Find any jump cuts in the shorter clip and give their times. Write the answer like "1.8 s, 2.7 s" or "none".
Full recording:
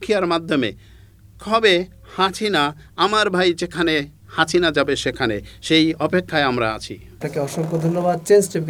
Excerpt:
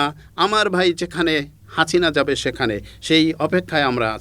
none